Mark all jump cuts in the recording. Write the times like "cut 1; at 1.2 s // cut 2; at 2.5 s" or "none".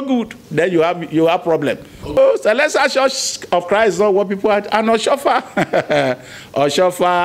cut 1; at 2.2 s